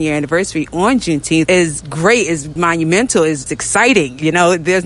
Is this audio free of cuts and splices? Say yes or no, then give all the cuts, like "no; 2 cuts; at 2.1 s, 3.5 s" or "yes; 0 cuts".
no; 3 cuts; at 1.5 s, 2.5 s, 3.5 s